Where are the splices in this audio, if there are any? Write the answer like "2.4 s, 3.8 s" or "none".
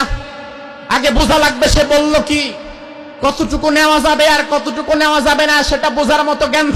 none